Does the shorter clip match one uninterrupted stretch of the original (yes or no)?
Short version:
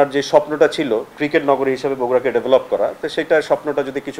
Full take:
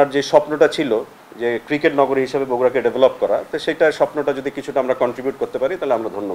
no